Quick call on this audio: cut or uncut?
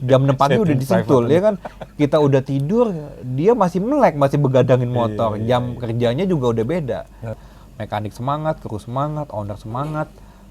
cut